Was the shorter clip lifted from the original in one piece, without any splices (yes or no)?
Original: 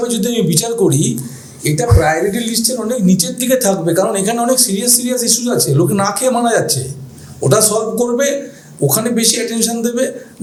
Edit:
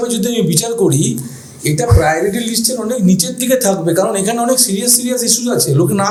yes